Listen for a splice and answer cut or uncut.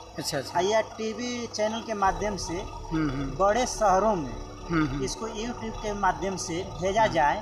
uncut